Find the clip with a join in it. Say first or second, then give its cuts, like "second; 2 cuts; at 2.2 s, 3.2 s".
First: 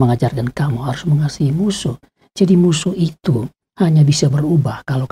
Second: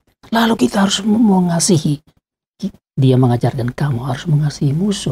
second; 1 cut; at 2.2 s